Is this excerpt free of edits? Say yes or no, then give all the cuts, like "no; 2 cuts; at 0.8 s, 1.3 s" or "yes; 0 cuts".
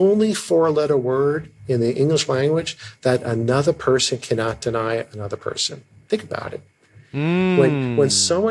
yes; 0 cuts